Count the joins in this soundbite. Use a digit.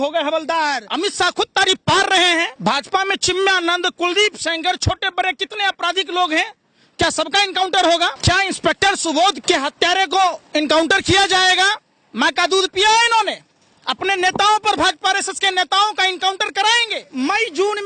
5